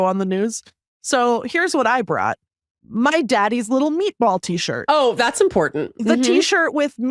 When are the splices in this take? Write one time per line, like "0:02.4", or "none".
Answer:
0:02.9